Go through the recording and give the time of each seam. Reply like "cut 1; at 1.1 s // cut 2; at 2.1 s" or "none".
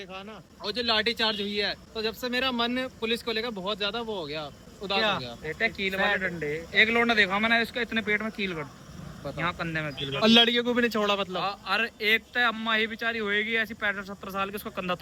none